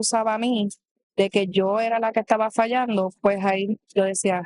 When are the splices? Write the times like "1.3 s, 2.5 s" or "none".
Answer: none